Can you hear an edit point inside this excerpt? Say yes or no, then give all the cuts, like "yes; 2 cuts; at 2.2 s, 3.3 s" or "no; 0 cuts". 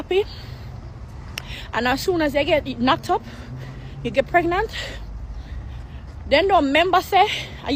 no; 0 cuts